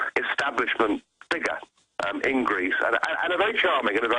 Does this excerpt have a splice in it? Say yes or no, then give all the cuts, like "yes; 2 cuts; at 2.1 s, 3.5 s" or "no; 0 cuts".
yes; 1 cut; at 1.2 s